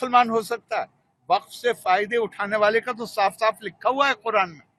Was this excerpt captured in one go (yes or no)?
yes